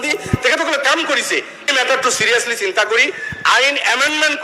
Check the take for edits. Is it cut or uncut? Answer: cut